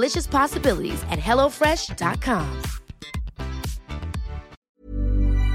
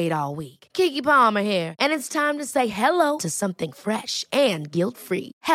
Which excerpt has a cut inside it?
first; 1 cut; at 4.6 s

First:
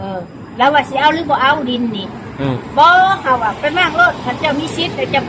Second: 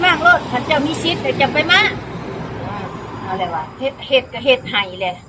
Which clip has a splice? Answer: second; 1 cut; at 3.7 s

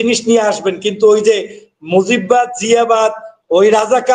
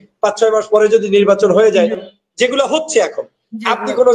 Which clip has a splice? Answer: second; 1 cut; at 2.1 s

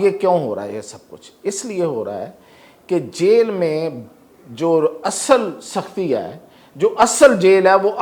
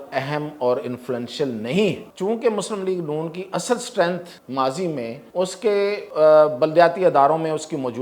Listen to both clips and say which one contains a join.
second; 4 cuts; at 2.1 s, 4.3 s, 5.2 s, 6.0 s

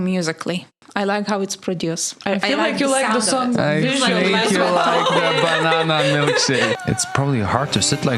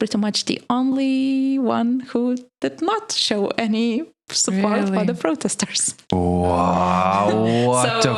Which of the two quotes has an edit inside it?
first; 1 cut; at 6.8 s

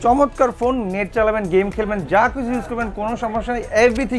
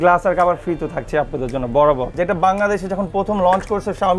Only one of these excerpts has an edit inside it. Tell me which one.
second; 1 cut; at 2.1 s

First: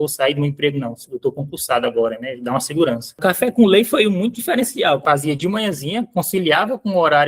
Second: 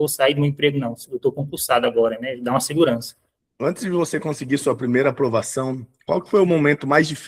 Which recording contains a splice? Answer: first; 2 cuts; at 3.1 s, 5.0 s

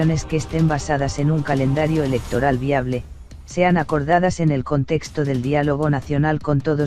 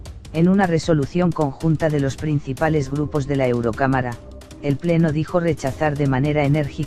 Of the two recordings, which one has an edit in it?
first; 1 cut; at 2.3 s

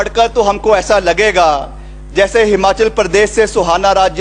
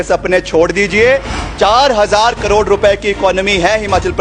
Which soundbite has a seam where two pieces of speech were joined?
second; 1 cut; at 1.4 s

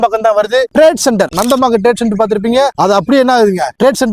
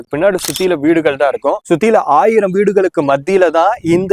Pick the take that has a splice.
first; 1 cut; at 1.3 s

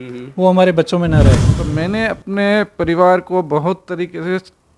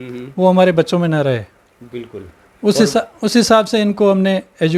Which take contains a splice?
first; 1 cut; at 1.5 s

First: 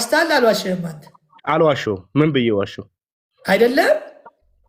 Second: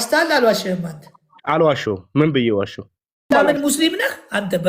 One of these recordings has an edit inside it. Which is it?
second; 1 cut; at 3.3 s

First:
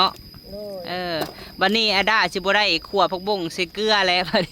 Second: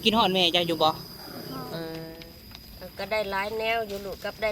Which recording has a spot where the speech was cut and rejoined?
second; 1 cut; at 2.0 s

